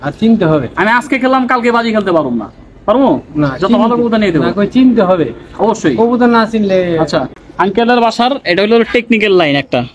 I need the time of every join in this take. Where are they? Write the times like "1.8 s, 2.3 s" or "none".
7.4 s